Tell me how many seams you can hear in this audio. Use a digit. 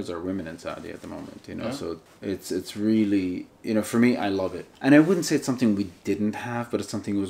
3